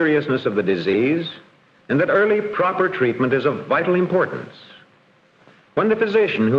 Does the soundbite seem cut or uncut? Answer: cut